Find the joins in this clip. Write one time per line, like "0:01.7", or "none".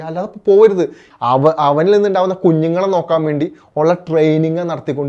0:01.1